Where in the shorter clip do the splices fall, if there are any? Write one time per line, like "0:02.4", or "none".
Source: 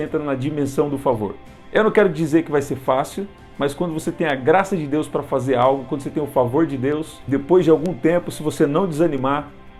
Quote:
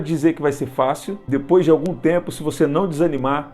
0:01.1